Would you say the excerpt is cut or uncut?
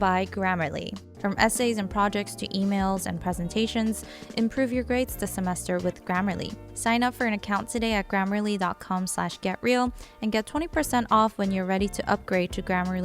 cut